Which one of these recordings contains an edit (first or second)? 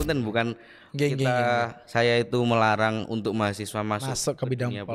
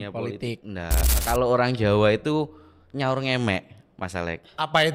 second